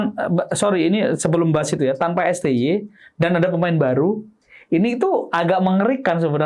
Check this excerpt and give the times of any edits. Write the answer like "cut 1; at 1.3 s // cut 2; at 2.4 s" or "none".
none